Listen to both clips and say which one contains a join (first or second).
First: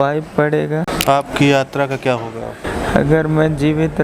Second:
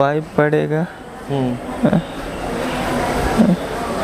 first